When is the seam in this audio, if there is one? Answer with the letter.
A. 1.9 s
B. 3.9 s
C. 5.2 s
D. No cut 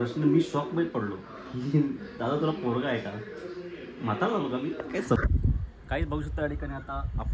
C